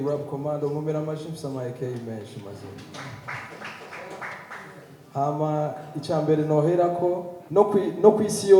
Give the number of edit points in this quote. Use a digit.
1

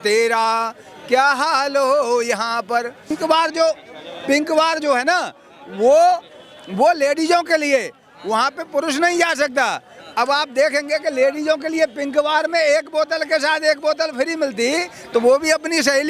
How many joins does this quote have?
1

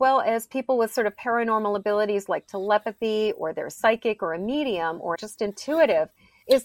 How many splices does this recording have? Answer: 1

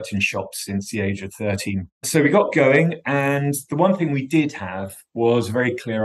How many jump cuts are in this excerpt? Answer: 1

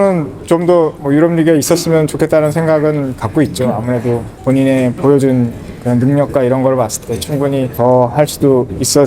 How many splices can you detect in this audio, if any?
3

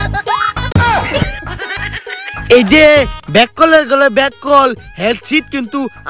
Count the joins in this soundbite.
0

